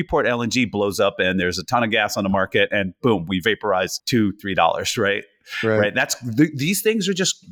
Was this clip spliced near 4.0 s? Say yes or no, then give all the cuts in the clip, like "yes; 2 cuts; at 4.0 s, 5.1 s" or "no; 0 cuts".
yes; 1 cut; at 4.0 s